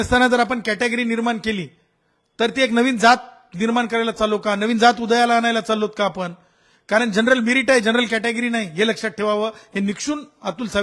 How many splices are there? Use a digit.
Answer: 0